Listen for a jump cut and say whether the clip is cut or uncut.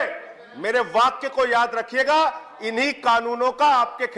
uncut